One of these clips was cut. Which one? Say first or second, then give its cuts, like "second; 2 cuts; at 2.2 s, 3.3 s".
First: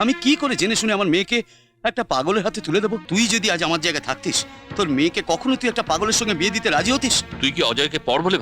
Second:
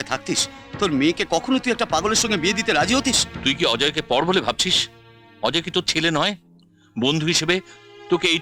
first; 1 cut; at 3.0 s